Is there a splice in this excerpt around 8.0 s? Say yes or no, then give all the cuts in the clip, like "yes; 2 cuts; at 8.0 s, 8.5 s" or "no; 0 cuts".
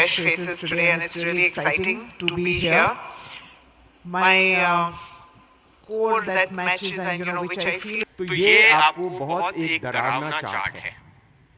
yes; 1 cut; at 8.0 s